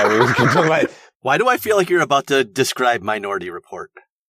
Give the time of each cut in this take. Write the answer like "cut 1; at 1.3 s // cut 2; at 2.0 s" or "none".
cut 1; at 1.0 s